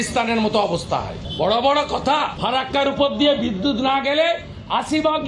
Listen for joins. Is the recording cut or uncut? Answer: cut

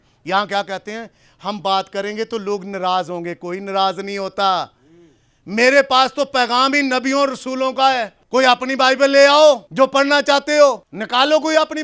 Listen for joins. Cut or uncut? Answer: cut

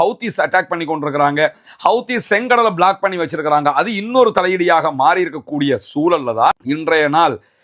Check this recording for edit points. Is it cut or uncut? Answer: cut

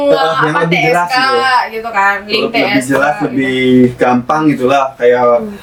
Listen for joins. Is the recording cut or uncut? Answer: uncut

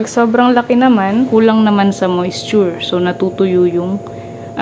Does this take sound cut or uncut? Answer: cut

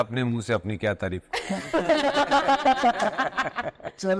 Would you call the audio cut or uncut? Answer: uncut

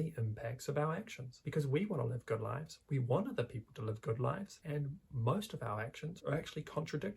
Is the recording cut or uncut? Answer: cut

